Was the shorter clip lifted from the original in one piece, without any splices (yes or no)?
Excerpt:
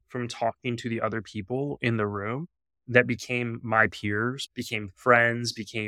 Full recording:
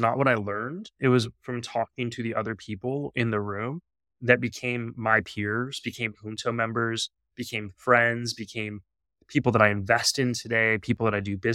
no